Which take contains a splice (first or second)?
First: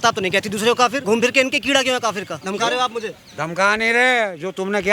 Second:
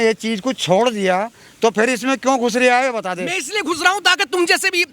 first